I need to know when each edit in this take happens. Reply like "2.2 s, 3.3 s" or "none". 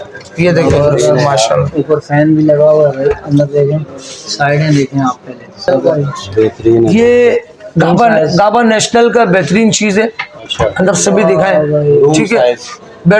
6.9 s